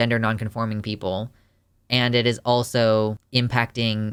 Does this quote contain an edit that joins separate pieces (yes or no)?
no